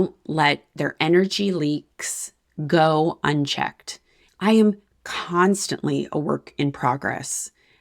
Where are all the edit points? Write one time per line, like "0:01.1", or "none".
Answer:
0:04.2